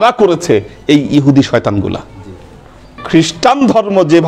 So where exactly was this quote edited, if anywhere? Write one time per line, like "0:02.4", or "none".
0:03.0